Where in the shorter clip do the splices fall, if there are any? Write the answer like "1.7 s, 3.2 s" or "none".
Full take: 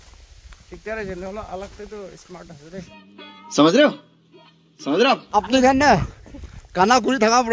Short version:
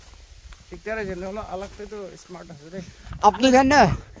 3.1 s